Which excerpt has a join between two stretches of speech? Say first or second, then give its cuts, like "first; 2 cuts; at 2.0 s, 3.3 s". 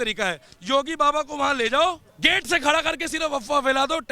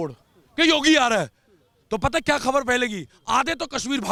first; 1 cut; at 2.1 s